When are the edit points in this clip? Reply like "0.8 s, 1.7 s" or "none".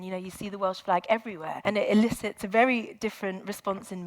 1.5 s, 2.4 s